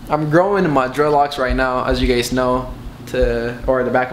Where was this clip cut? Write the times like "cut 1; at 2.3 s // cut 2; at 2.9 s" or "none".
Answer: none